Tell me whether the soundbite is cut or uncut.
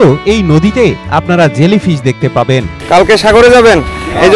cut